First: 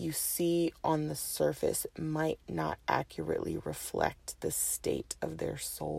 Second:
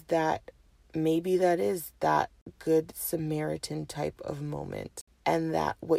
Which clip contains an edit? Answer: second; 2 cuts; at 2.4 s, 5.0 s

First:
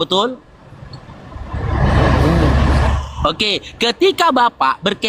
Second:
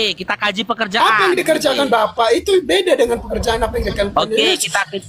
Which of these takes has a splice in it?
first; 1 cut; at 0.9 s

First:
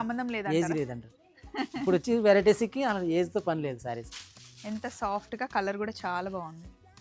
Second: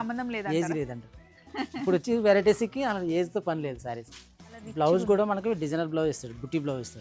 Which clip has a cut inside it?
second; 1 cut; at 4.6 s

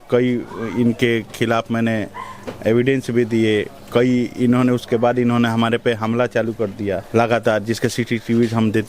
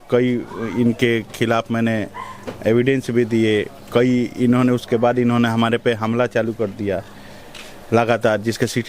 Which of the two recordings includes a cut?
first; 1 cut; at 7.0 s

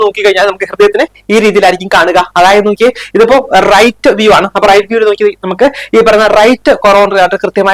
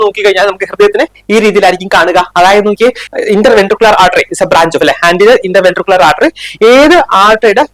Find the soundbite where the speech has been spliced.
second; 1 cut; at 3.0 s

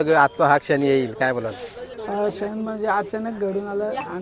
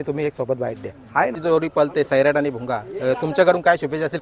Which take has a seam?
second; 1 cut; at 1.4 s

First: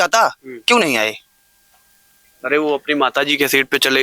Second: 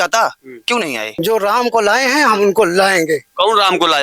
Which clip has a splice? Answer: second; 1 cut; at 1.1 s

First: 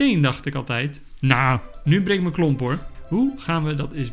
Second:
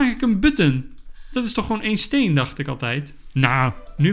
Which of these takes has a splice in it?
first; 1 cut; at 2.9 s

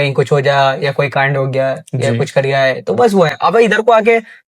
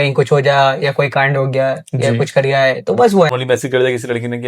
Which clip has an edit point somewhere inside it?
second; 1 cut; at 3.3 s

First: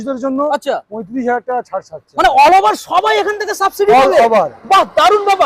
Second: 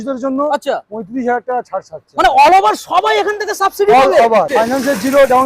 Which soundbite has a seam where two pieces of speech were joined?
second; 1 cut; at 4.5 s

